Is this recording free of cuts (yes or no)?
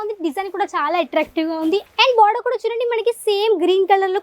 no